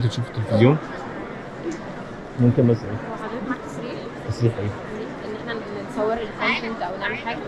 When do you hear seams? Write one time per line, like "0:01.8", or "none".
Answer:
none